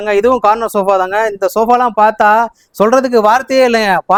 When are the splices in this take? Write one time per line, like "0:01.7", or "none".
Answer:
none